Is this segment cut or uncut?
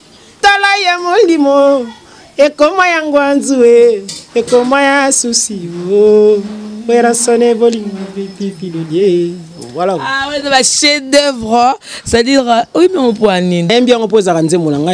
cut